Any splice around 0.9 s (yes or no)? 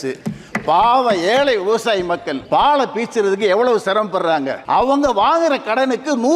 no